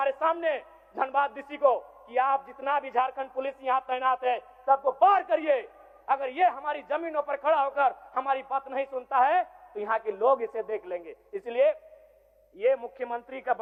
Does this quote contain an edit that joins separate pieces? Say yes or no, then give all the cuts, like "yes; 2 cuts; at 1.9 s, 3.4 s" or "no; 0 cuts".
no; 0 cuts